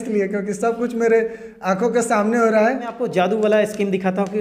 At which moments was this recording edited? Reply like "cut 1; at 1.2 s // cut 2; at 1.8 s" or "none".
cut 1; at 3.0 s